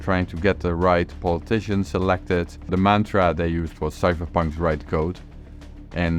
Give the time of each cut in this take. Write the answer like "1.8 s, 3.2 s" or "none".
2.7 s